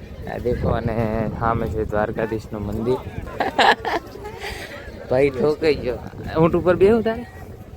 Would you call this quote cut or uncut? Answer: cut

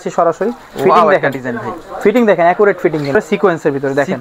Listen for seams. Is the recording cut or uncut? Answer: cut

